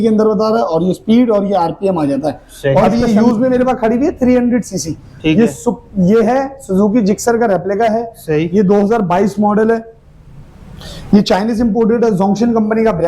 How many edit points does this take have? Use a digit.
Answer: 1